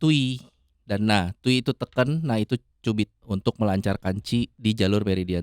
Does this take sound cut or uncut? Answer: cut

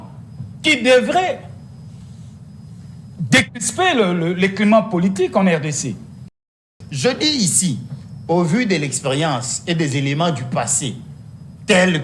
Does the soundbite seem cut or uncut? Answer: cut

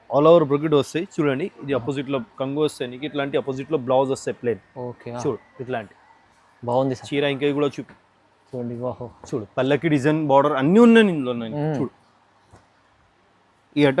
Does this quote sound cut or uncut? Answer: cut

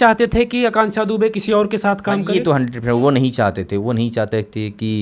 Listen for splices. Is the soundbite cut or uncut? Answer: uncut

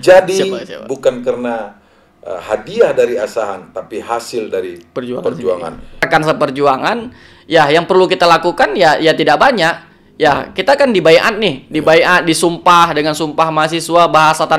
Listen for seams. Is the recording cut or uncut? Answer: cut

